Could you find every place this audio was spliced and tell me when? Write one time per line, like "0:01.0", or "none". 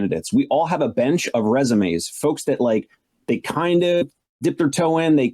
0:04.4